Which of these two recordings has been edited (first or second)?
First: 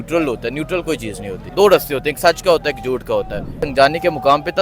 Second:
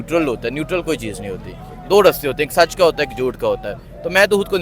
first